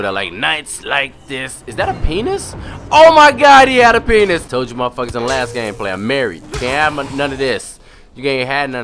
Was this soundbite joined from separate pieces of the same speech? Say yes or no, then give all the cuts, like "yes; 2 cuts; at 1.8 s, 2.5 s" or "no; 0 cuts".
yes; 1 cut; at 4.5 s